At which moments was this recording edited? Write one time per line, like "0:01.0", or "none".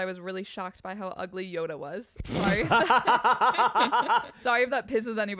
0:04.3